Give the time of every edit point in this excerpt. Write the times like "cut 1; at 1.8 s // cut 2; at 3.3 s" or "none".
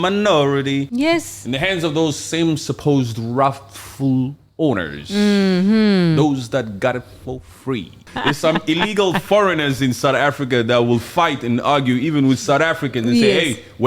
cut 1; at 0.9 s // cut 2; at 8.1 s